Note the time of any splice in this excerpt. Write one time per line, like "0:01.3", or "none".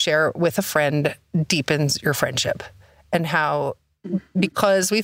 none